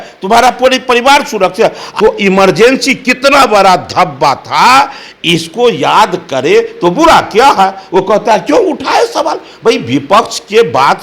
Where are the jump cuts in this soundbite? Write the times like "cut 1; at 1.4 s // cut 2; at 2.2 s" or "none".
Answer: cut 1; at 1.8 s